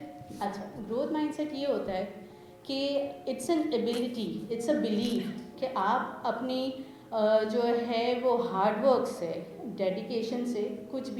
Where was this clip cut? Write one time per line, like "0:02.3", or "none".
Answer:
none